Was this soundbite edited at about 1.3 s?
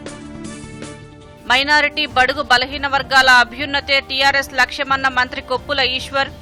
no; 0 cuts

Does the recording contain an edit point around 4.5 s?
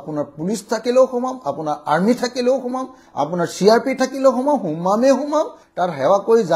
no; 0 cuts

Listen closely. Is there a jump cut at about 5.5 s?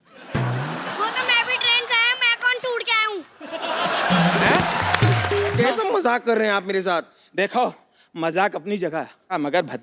yes; 1 cut; at 5.5 s

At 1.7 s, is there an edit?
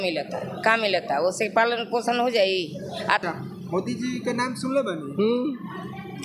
no; 1 cut; at 3.2 s

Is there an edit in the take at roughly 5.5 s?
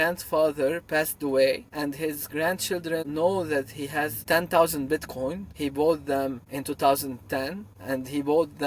yes; 6 cuts; at 1.7 s, 3.1 s, 4.2 s, 5.5 s, 6.5 s, 7.7 s

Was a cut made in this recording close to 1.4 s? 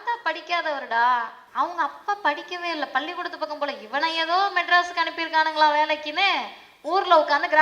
yes; 1 cut; at 1.4 s

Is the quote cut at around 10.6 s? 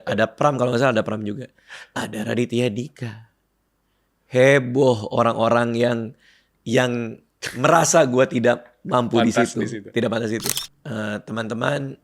yes; 1 cut; at 10.6 s

